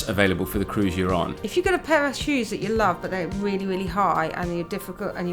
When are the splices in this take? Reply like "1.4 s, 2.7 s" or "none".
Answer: 1.4 s